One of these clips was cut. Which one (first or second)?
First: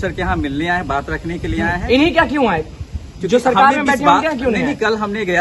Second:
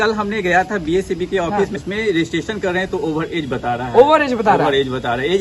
second